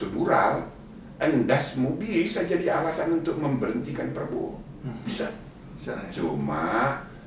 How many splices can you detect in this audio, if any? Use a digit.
0